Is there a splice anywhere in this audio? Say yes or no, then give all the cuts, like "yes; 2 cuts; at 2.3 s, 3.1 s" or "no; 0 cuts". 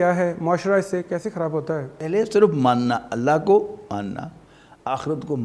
yes; 1 cut; at 1.9 s